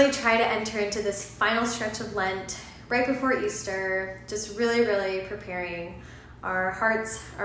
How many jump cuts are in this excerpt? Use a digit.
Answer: 0